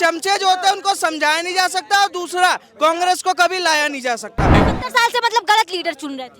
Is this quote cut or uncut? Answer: cut